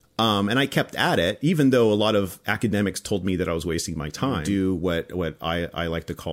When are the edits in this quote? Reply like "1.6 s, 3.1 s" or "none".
4.4 s